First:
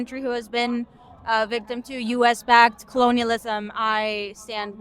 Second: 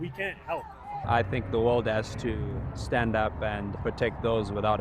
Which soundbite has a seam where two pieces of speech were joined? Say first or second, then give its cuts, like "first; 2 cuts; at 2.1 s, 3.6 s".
second; 2 cuts; at 1.0 s, 3.7 s